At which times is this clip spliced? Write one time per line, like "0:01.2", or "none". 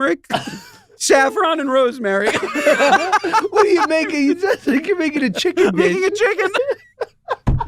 none